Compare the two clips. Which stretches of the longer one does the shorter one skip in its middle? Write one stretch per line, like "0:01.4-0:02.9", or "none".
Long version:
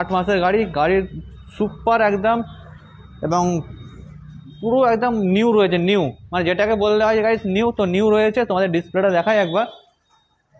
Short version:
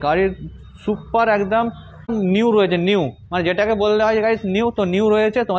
0:02.8-0:05.1

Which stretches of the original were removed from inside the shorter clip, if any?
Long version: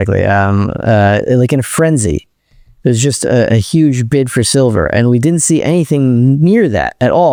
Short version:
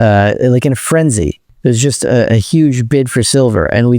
0:02.3-0:02.6

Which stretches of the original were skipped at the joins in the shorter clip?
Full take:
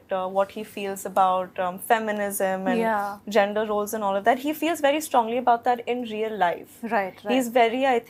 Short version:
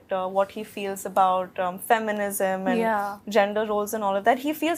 none

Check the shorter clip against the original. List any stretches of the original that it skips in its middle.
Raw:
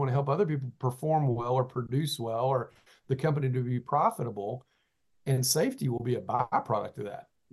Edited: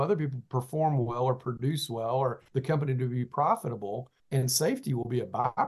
0:02.7-0:03.0
0:04.7-0:05.1

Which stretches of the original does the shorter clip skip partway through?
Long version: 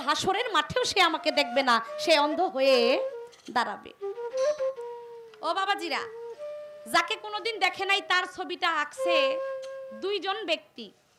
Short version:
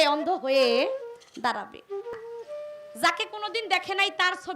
0:04.2-0:06.0

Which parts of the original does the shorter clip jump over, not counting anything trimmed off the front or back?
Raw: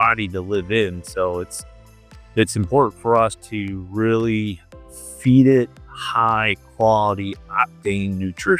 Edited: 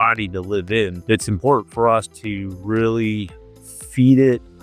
0:01.0-0:02.2

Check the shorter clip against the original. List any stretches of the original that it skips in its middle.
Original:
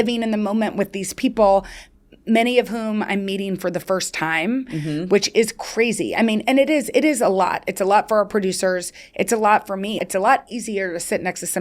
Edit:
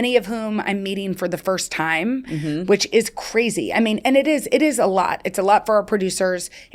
none

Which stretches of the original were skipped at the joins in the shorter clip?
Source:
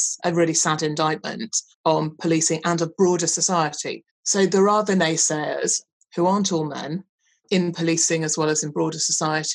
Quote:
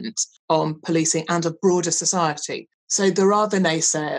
none

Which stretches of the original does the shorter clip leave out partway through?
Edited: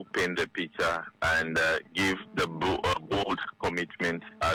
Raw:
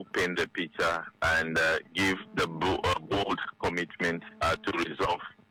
none

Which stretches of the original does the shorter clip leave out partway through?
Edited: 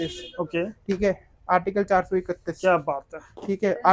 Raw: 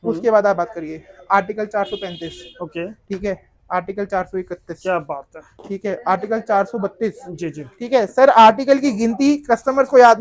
none

